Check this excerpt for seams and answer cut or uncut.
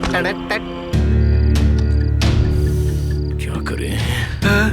cut